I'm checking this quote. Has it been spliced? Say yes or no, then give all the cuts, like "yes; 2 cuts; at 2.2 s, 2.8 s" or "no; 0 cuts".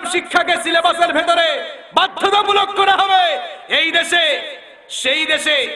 no; 0 cuts